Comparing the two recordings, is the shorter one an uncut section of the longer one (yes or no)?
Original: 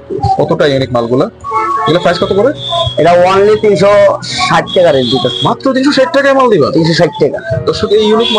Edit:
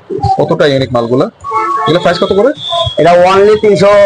yes